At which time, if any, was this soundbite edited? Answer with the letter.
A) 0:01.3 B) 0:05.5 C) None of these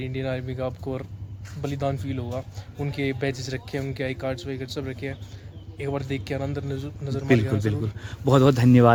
C